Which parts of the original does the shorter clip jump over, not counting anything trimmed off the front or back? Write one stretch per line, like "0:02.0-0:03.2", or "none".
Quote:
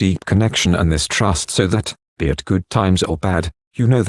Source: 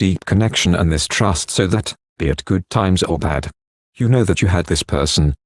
0:03.2-0:03.4